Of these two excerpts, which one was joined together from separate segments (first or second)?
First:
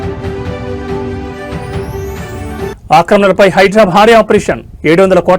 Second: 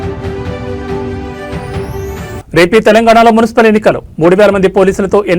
second